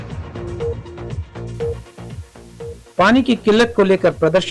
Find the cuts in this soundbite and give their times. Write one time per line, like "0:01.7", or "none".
0:02.8